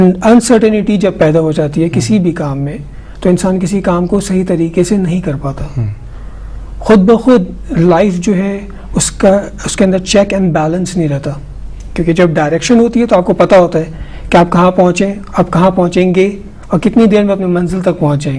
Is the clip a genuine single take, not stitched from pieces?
yes; 0 cuts

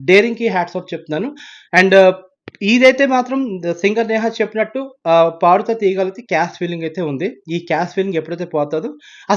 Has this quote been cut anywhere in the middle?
no; 0 cuts

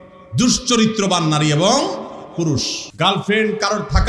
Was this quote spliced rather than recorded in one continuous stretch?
yes; 1 cut; at 2.8 s

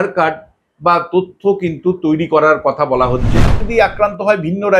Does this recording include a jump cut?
yes; 1 cut; at 3.6 s

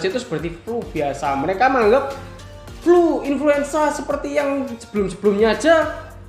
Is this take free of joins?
yes; 0 cuts

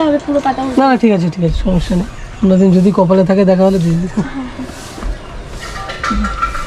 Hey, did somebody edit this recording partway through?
no; 0 cuts

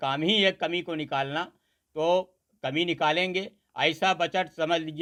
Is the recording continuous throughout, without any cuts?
yes; 0 cuts

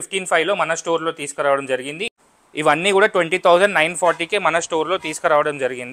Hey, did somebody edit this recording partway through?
yes; 1 cut; at 2.1 s

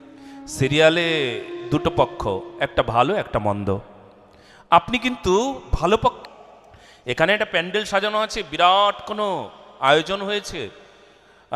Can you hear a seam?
yes; 1 cut; at 6.2 s

